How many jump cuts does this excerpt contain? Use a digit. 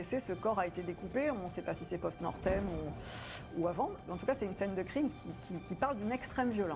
0